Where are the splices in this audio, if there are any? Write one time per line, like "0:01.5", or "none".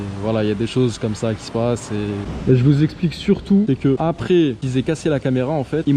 none

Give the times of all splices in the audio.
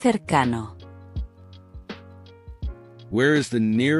none

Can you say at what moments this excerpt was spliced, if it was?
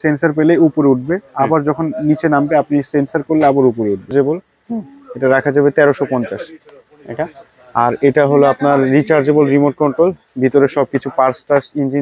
0:04.1

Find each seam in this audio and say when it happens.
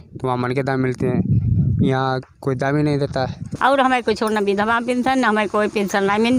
0:03.4

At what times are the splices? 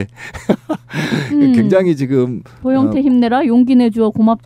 0:02.0

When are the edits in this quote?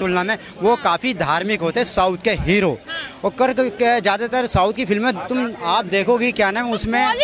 none

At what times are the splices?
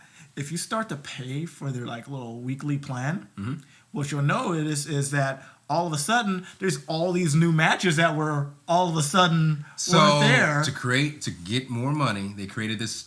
none

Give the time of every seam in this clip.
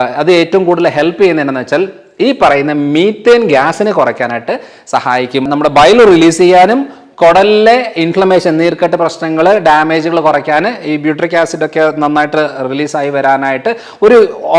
0:05.5

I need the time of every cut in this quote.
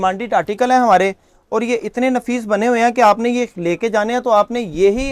none

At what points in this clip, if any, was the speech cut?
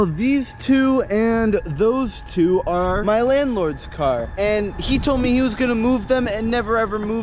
none

